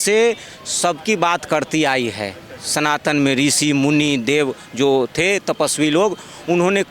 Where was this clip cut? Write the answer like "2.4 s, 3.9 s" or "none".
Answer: none